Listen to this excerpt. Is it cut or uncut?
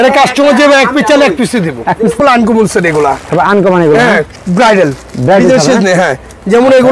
cut